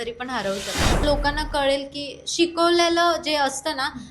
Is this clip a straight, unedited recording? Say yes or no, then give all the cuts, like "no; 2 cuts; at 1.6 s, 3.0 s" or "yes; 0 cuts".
no; 1 cut; at 1.0 s